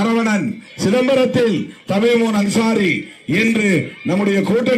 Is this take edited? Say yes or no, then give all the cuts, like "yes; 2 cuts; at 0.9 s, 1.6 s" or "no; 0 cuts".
no; 0 cuts